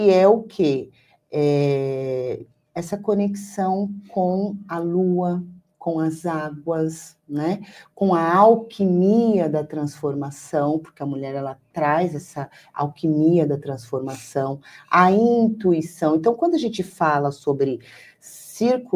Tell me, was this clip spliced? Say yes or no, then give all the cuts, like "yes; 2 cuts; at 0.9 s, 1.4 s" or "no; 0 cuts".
no; 0 cuts